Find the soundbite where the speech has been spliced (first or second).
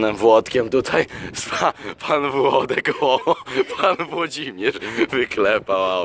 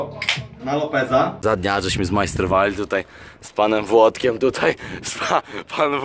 second